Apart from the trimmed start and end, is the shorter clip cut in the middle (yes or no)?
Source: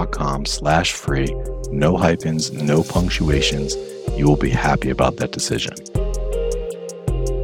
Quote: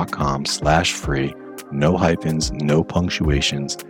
no